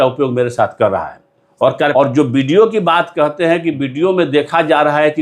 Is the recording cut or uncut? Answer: cut